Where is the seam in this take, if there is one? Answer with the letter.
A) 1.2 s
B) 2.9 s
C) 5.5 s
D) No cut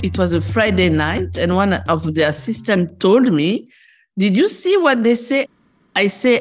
C